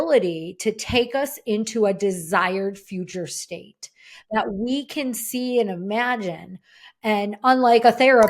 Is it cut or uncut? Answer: uncut